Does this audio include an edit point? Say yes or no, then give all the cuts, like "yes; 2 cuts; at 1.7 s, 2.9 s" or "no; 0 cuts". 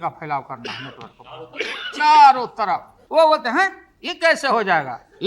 yes; 1 cut; at 2.9 s